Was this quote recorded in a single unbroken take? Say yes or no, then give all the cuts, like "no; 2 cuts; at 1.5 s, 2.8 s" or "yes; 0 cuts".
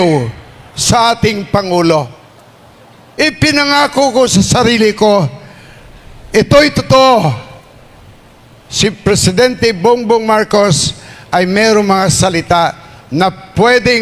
yes; 0 cuts